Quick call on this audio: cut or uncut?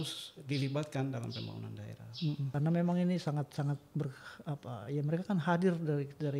cut